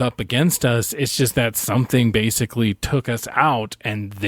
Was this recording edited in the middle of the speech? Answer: no; 0 cuts

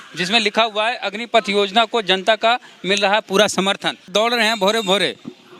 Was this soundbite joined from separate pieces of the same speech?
yes; 1 cut; at 4.0 s

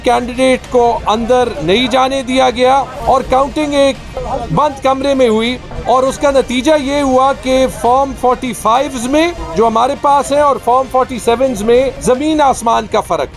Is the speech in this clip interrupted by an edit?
yes; 5 cuts; at 2.9 s, 4.1 s, 5.7 s, 9.4 s, 12.0 s

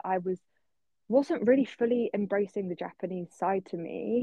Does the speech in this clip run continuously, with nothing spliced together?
yes; 0 cuts

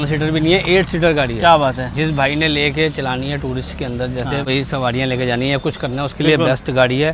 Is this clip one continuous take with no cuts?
yes; 0 cuts

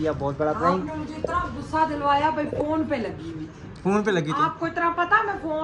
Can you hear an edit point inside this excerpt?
no; 0 cuts

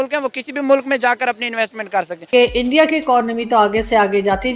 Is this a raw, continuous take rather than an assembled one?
yes; 0 cuts

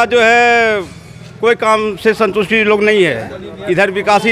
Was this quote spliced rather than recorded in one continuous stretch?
no; 0 cuts

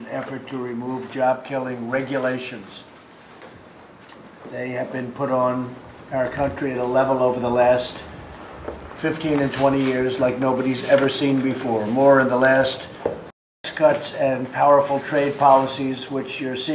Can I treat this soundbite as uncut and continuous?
no; 1 cut; at 13.4 s

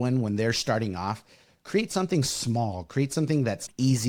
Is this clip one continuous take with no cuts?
yes; 0 cuts

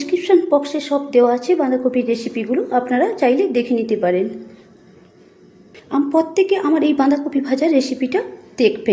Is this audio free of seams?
yes; 0 cuts

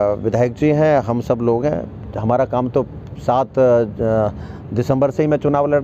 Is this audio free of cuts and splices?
yes; 0 cuts

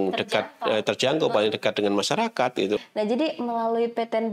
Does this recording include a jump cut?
yes; 1 cut; at 2.8 s

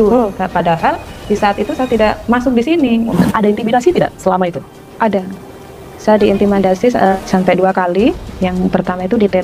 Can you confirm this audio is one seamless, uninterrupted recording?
no; 3 cuts; at 2.6 s, 3.1 s, 7.2 s

